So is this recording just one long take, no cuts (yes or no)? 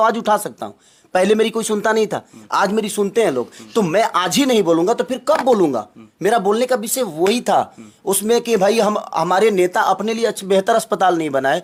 yes